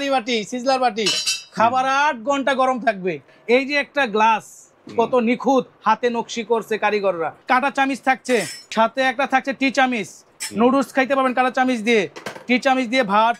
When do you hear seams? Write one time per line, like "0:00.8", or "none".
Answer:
0:03.3
0:07.4
0:08.6